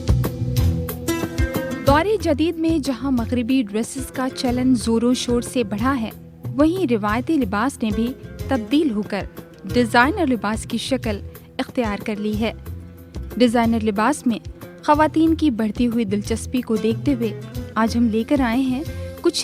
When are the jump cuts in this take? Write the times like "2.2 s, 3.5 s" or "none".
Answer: none